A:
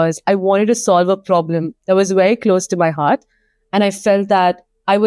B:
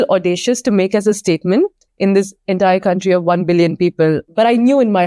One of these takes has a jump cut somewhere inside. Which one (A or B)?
B